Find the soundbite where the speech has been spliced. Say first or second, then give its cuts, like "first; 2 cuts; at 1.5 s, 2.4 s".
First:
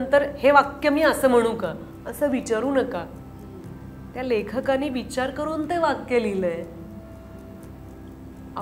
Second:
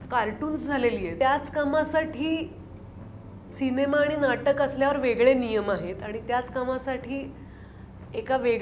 second; 1 cut; at 1.1 s